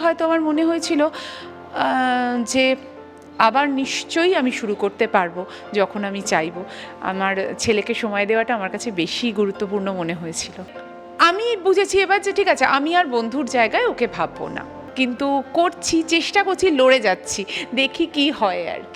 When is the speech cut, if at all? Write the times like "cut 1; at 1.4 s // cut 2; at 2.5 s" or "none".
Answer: cut 1; at 10.8 s // cut 2; at 14.8 s

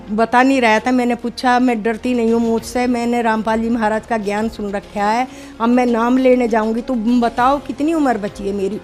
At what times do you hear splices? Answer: none

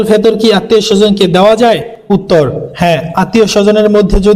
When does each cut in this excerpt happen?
none

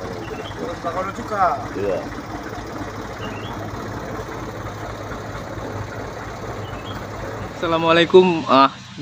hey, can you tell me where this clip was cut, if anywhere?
cut 1; at 7.5 s

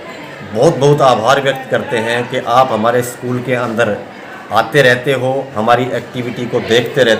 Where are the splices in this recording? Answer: none

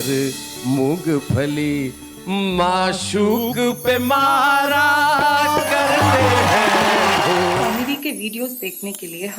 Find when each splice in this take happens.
cut 1; at 7.7 s

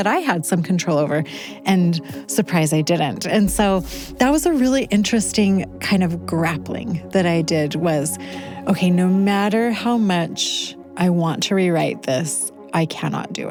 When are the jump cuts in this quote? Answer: none

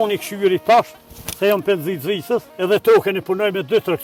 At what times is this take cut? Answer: none

